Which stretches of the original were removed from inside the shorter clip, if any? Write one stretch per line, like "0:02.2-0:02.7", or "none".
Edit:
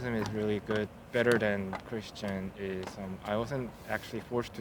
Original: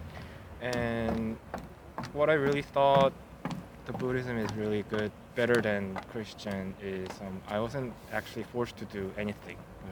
none